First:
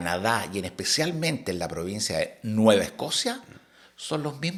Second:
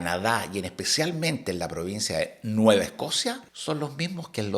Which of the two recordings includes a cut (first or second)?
second